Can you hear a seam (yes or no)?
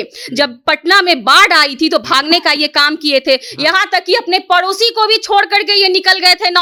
no